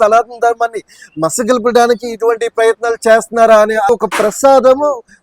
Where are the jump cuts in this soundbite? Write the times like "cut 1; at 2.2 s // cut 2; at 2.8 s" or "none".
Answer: cut 1; at 3.9 s